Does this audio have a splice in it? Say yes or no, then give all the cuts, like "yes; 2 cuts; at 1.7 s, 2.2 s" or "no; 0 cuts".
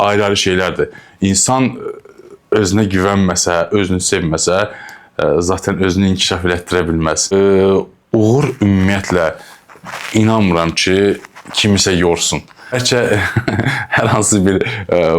yes; 2 cuts; at 7.3 s, 12.7 s